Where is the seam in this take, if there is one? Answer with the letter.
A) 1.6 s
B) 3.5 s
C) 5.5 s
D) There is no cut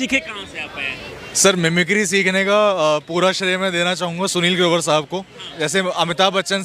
C